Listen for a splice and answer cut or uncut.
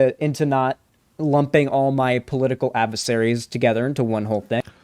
uncut